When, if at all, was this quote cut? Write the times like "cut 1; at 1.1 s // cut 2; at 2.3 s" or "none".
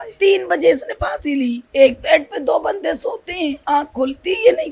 cut 1; at 1.6 s // cut 2; at 3.6 s